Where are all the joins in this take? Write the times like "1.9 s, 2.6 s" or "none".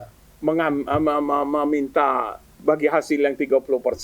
2.5 s